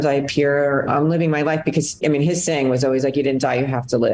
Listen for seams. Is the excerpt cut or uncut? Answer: cut